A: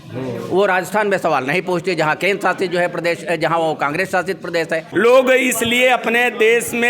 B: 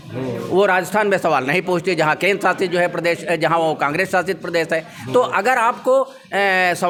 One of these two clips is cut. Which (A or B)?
A